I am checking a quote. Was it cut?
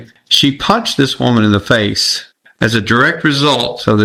no; 0 cuts

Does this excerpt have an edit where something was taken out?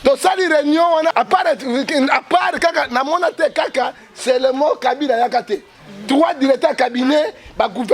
yes; 1 cut; at 1.1 s

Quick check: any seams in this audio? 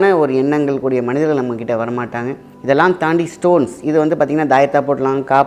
yes; 1 cut; at 2.5 s

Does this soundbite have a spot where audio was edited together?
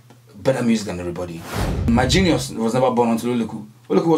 yes; 1 cut; at 1.9 s

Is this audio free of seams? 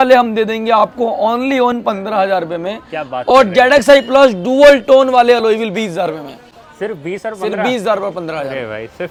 yes; 0 cuts

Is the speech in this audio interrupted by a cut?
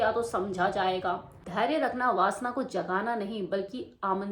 yes; 1 cut; at 1.4 s

